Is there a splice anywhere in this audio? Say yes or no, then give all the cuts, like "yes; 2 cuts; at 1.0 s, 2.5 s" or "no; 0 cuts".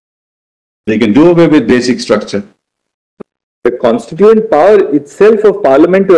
yes; 1 cut; at 3.0 s